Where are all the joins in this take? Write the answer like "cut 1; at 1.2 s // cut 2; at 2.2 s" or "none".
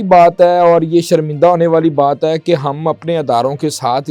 none